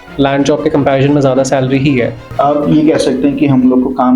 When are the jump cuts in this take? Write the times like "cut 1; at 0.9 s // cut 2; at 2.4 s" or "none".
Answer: cut 1; at 2.3 s